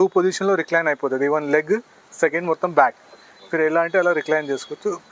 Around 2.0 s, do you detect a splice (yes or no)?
no